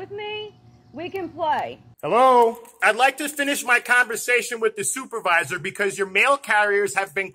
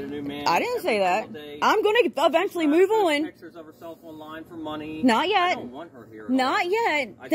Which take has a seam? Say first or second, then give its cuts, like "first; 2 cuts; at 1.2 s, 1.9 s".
first; 2 cuts; at 1.9 s, 2.7 s